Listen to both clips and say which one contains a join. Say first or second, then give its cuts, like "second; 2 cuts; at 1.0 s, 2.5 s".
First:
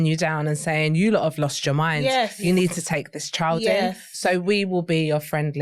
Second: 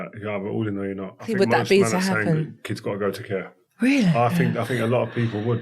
second; 3 cuts; at 1.2 s, 3.6 s, 4.7 s